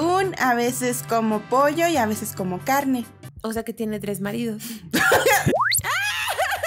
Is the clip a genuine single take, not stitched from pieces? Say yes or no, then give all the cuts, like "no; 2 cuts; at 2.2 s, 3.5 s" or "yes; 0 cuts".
no; 1 cut; at 5.6 s